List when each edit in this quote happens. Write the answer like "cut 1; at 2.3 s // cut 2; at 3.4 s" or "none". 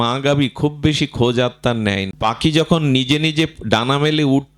cut 1; at 2.1 s